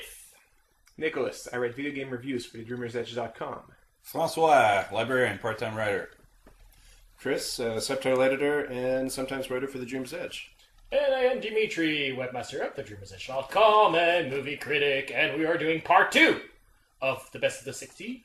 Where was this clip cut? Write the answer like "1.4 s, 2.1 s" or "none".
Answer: none